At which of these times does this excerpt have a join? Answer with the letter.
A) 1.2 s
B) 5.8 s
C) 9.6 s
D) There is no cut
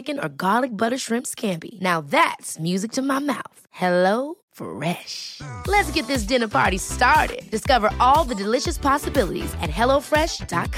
D